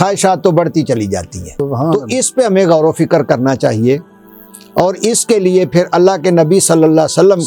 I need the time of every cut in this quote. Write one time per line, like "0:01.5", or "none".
0:01.6